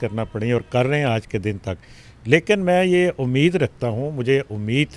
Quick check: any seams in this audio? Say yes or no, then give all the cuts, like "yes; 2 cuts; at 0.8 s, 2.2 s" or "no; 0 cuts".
no; 0 cuts